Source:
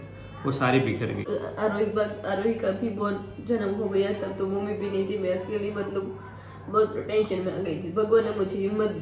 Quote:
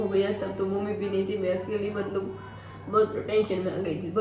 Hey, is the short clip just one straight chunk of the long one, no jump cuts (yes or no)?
yes